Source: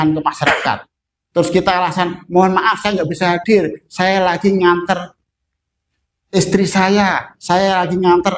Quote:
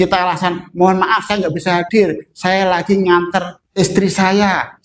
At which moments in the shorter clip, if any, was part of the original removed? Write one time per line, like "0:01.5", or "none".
0:03.6